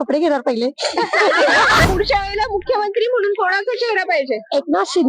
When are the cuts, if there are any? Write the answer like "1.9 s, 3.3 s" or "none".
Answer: 1.8 s